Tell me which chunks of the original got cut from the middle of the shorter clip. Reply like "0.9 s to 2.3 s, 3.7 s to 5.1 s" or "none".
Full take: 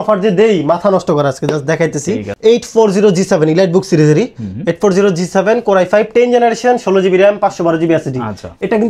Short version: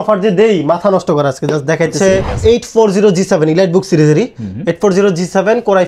none